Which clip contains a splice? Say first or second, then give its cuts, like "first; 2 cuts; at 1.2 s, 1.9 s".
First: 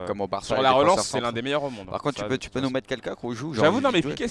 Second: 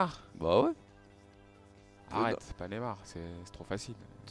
second; 1 cut; at 3.2 s